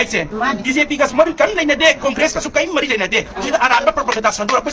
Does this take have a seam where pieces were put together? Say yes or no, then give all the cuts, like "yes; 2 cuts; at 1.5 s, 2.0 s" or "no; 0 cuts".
no; 0 cuts